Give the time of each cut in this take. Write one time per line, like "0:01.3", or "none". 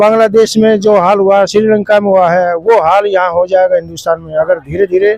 none